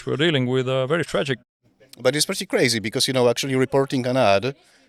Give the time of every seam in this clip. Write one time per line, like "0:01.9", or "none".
none